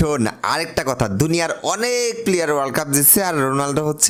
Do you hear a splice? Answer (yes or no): no